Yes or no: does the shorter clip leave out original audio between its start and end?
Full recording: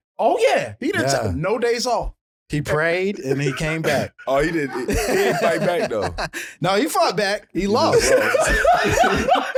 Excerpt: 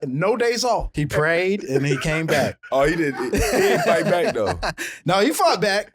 yes